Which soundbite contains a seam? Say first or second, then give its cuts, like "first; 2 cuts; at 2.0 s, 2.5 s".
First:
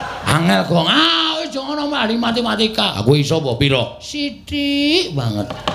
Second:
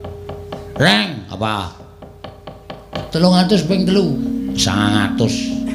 second; 1 cut; at 2.9 s